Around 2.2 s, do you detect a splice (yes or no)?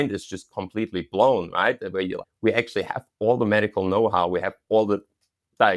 yes